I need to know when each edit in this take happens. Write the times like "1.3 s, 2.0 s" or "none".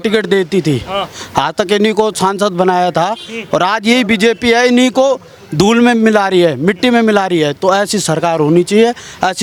none